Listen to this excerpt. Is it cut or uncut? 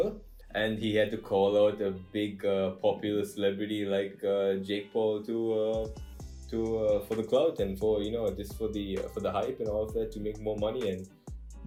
uncut